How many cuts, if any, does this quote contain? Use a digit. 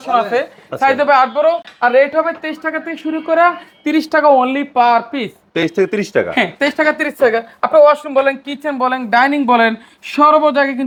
0